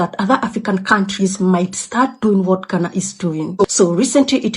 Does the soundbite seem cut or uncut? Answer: cut